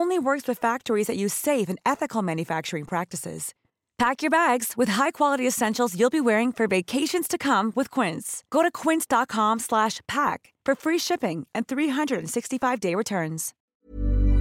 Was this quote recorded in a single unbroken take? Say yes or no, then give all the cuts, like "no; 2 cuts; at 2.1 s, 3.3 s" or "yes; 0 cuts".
no; 1 cut; at 13.5 s